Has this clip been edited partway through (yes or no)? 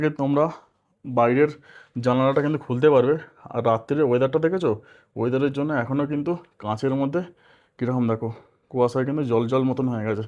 no